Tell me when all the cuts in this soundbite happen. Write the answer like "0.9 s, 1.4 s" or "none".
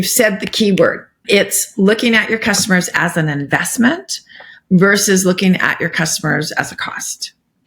1.2 s